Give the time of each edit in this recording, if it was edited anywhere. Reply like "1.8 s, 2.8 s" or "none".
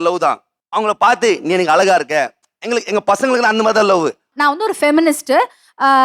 4.3 s